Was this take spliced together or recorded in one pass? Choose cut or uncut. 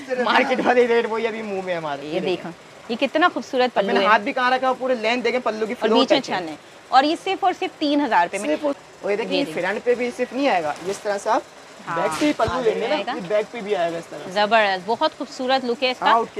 cut